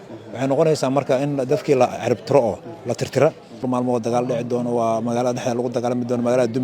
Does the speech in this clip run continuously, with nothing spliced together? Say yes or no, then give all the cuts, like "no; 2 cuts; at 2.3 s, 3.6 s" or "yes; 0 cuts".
no; 1 cut; at 3.7 s